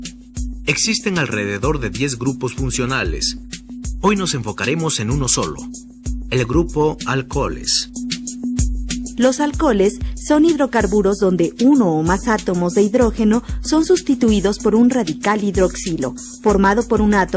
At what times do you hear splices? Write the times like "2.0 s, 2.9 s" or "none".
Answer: 2.7 s